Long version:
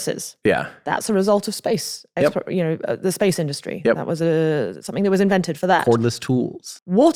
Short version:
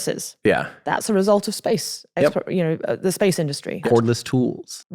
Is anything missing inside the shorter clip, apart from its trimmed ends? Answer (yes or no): yes